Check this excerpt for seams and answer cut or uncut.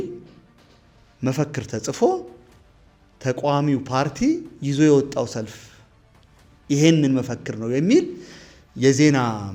uncut